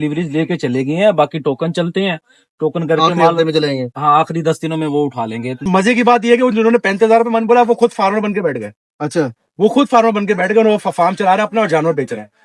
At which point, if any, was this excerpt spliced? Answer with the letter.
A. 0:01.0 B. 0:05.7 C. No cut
B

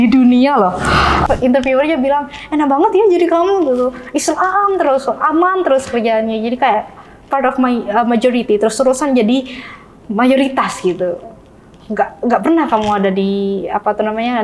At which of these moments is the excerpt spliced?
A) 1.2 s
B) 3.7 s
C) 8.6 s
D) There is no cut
A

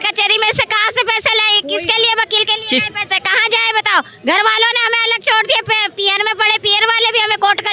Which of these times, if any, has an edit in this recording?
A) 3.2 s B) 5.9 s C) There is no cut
C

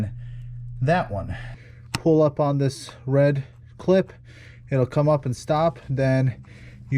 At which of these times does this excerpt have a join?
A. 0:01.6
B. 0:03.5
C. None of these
A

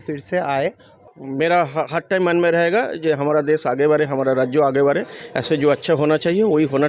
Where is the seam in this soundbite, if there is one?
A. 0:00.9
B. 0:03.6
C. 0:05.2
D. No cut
A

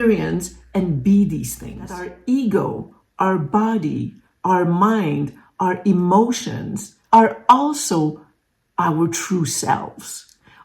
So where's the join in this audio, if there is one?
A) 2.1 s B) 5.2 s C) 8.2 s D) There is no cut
A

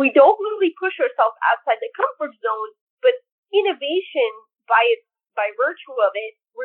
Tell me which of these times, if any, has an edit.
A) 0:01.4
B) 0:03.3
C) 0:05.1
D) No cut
B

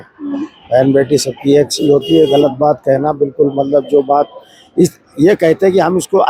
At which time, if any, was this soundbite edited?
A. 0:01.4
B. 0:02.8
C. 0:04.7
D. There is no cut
D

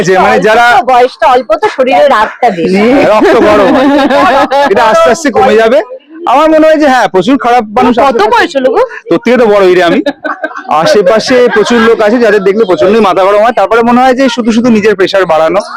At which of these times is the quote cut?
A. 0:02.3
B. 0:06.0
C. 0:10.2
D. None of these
D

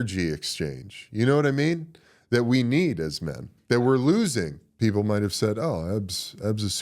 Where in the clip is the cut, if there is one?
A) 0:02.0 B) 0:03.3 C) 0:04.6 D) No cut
C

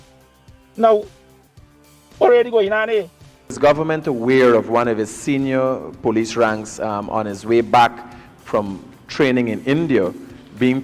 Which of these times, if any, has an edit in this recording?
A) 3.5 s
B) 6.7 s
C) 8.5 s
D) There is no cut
A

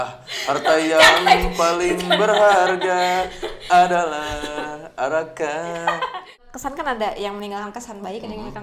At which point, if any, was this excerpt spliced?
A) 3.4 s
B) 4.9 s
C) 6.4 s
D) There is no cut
C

